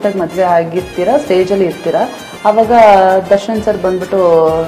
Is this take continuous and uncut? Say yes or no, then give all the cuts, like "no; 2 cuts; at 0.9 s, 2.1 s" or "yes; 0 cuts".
yes; 0 cuts